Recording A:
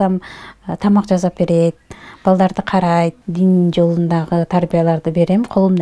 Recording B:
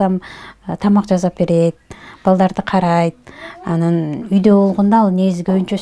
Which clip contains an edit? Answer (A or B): A